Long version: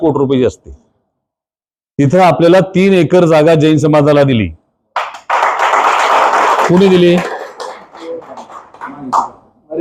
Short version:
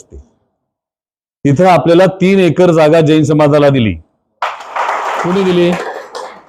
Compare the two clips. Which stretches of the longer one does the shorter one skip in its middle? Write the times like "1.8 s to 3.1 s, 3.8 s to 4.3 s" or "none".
5.6 s to 6.5 s